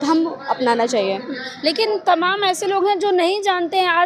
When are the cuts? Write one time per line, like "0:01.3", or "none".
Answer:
none